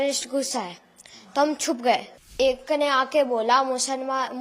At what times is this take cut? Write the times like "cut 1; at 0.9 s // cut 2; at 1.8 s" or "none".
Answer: cut 1; at 2.3 s